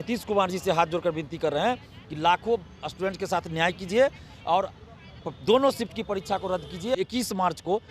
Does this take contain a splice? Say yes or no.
yes